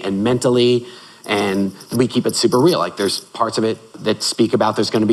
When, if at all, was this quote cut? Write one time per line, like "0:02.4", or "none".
0:01.9
0:03.9